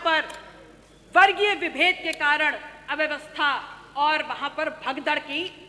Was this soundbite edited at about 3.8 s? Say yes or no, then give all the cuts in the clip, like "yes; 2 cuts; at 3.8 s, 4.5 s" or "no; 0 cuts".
no; 0 cuts